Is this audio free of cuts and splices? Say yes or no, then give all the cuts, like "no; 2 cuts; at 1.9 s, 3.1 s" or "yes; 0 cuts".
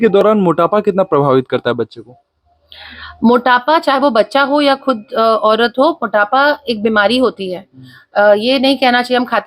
yes; 0 cuts